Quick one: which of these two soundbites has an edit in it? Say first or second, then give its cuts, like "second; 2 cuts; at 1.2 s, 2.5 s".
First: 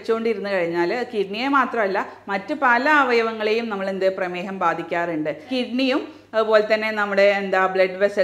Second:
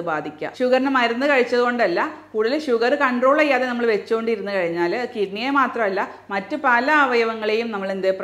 first; 1 cut; at 5.5 s